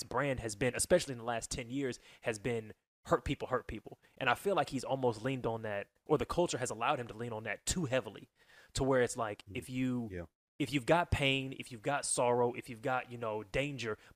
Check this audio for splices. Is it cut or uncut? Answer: uncut